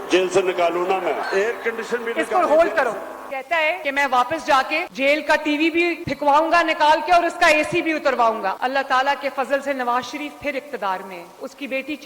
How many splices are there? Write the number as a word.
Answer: three